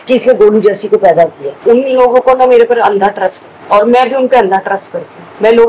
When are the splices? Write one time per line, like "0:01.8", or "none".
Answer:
0:01.5